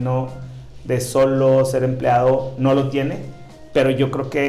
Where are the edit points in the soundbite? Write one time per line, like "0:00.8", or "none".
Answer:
none